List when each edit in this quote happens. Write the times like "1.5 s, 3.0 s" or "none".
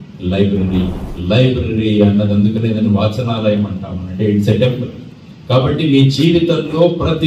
1.1 s